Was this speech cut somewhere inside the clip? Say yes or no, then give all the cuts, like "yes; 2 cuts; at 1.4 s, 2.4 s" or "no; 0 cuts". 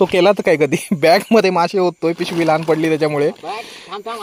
no; 0 cuts